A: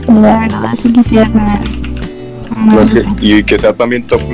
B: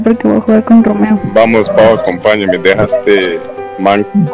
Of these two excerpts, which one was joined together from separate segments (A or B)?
B